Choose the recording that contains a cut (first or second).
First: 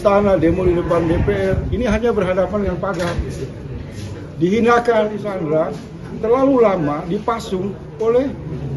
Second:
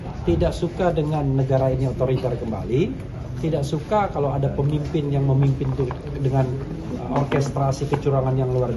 first